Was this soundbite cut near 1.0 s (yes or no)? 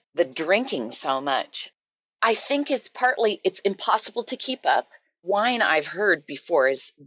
no